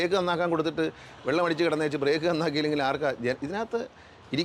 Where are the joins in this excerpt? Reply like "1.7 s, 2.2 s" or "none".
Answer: none